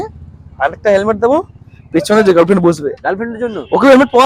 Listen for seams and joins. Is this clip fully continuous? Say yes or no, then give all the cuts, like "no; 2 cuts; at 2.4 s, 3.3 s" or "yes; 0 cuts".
yes; 0 cuts